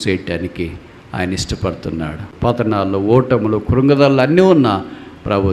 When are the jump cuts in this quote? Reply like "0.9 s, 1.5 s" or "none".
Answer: 2.3 s